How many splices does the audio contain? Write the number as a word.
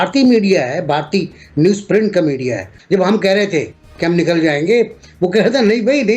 one